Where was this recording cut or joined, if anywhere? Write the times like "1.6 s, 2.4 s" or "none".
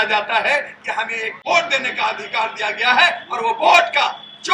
1.3 s